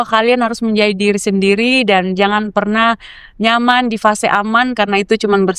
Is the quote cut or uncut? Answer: uncut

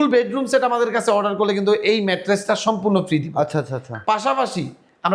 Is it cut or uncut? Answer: uncut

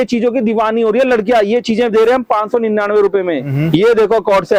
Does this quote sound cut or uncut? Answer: uncut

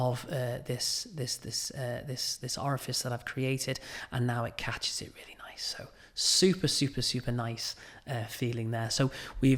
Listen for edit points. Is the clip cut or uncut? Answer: uncut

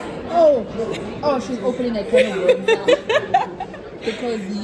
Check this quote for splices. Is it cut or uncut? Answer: uncut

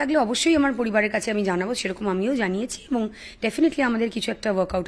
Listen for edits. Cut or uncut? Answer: uncut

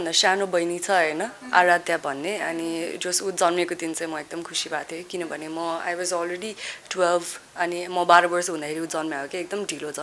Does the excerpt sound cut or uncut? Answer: uncut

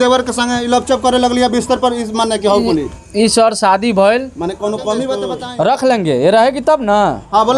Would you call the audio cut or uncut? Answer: cut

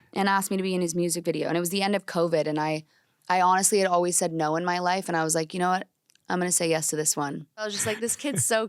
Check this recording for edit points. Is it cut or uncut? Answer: cut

